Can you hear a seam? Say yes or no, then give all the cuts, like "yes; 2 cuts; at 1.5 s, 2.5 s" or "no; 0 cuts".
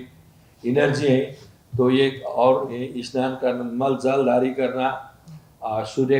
no; 0 cuts